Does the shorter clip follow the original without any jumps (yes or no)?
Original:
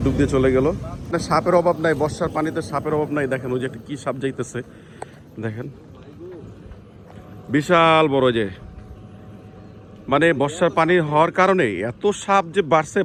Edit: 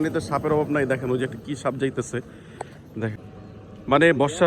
no